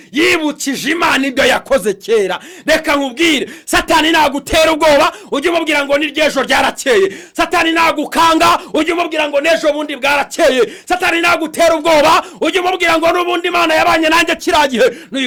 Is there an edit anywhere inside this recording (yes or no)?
no